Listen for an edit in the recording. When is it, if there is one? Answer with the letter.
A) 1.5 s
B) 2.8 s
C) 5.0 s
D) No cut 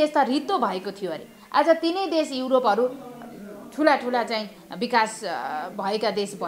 D